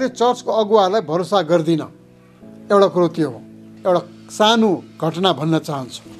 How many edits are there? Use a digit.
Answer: 1